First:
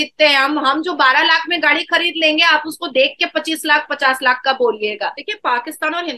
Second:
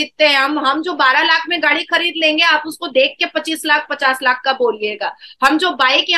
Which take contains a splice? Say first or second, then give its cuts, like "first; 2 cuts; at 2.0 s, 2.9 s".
first; 1 cut; at 5.2 s